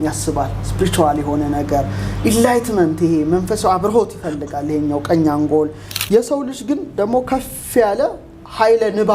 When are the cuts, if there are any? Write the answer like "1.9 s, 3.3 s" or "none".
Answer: 5.9 s